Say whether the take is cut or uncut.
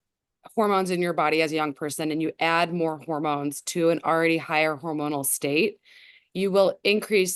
uncut